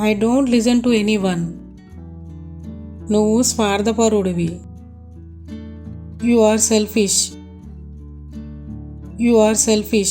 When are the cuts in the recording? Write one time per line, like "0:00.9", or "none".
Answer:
0:01.5
0:03.0
0:04.6
0:06.1
0:07.3
0:09.1